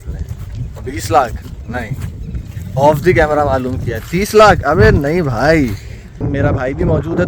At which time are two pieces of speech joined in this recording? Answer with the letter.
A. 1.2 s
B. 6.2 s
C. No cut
B